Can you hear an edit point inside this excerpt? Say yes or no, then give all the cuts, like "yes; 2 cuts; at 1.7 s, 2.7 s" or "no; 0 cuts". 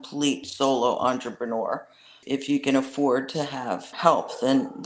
yes; 2 cuts; at 2.2 s, 3.9 s